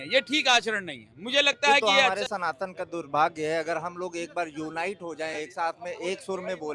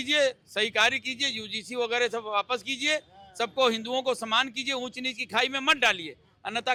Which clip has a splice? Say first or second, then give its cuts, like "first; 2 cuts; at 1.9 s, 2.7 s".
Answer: first; 1 cut; at 2.0 s